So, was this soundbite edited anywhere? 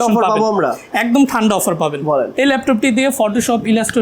yes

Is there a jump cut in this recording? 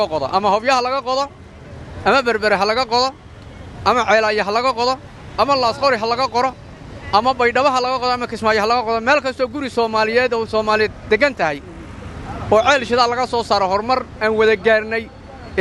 no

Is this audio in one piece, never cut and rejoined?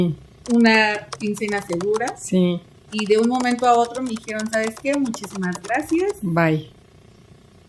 yes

